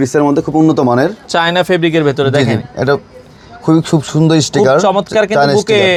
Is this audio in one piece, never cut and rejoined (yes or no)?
yes